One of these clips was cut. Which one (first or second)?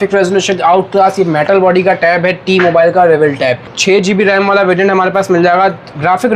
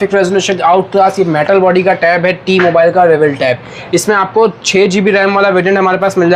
first